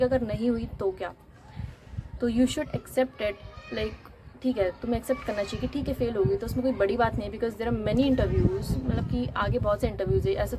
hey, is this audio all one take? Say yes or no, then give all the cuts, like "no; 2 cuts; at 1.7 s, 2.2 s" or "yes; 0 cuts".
yes; 0 cuts